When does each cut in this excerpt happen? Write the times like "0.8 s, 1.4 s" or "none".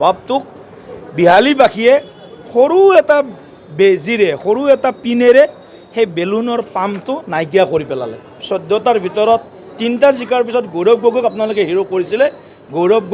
8.4 s